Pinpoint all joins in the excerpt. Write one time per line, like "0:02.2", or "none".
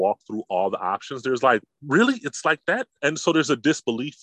0:02.9